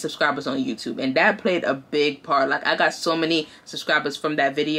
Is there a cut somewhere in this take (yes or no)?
no